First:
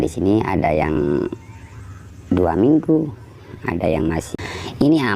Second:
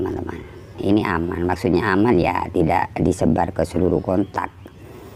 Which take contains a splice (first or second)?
first